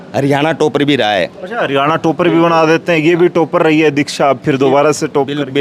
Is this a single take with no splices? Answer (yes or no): yes